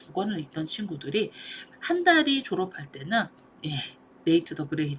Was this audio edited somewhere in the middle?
no; 0 cuts

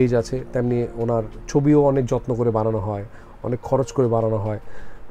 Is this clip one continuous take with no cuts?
yes; 0 cuts

